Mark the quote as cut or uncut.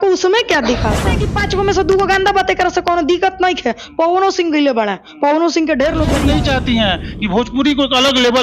cut